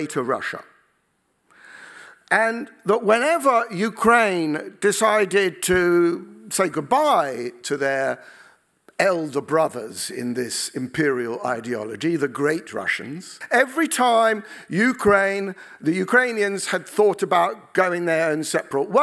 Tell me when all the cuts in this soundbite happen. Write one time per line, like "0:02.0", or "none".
0:13.4